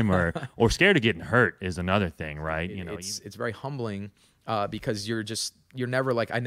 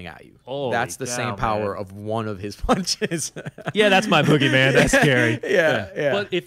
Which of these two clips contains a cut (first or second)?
first